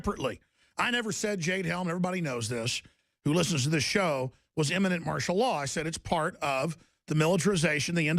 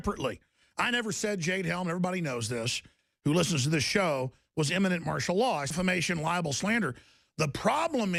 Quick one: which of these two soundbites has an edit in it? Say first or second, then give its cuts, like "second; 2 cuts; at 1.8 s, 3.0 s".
first; 1 cut; at 5.7 s